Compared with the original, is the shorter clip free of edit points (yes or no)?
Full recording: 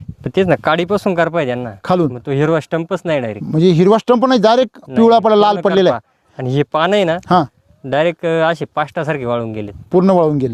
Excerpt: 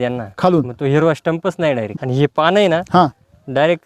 no